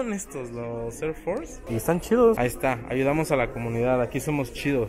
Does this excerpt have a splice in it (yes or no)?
yes